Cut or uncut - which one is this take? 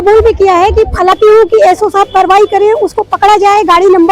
cut